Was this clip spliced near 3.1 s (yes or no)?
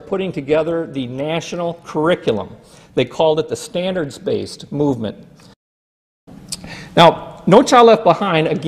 no